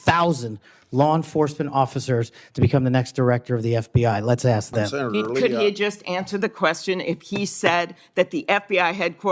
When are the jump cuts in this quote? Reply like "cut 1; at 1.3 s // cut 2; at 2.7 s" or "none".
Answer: cut 1; at 4.9 s